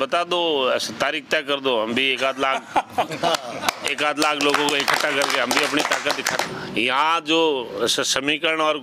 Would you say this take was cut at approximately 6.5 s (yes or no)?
yes